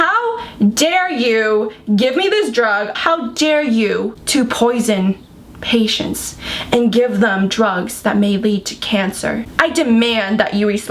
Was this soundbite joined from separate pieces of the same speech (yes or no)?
yes